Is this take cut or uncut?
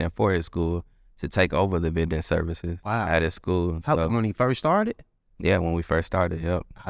cut